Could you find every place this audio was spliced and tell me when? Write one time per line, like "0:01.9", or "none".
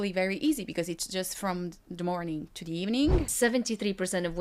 0:03.3